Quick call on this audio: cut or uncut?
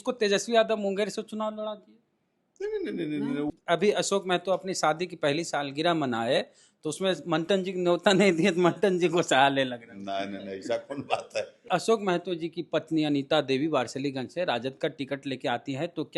cut